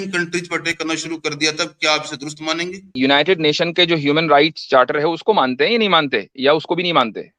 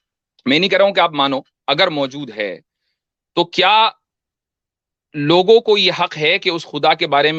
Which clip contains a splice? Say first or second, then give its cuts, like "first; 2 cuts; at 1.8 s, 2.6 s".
first; 1 cut; at 2.8 s